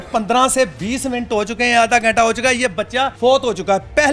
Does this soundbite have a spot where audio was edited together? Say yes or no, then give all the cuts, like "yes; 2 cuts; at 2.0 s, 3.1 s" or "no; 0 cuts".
yes; 1 cut; at 3.1 s